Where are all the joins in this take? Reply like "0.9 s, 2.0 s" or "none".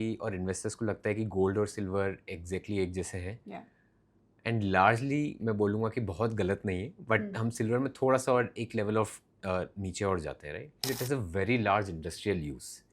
10.8 s

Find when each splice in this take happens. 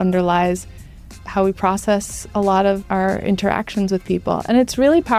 1.1 s, 2.8 s

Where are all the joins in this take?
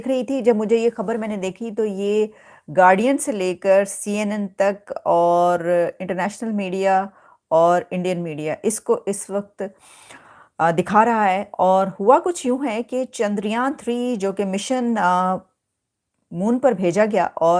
none

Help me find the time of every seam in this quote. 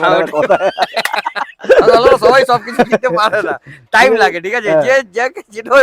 none

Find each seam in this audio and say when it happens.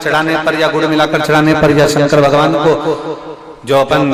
none

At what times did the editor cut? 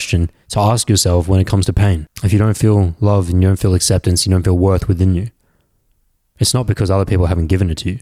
2.1 s

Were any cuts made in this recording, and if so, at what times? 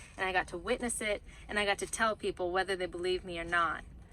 none

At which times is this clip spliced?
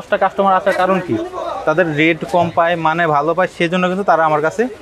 none

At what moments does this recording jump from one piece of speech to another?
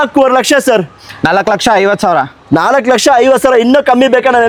none

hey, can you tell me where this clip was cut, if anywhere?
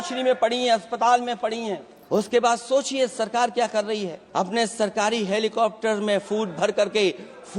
1.9 s, 4.2 s

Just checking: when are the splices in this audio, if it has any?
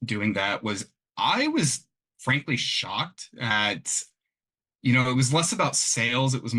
3.5 s

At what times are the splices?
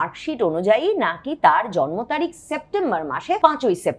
none

